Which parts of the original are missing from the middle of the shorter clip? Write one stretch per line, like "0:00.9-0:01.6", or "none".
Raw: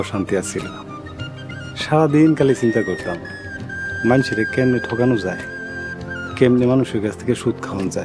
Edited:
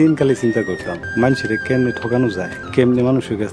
0:03.2-0:03.8
0:05.4-0:06.2